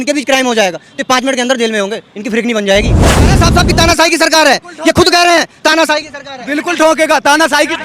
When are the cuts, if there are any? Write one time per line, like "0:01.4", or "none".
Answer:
0:03.4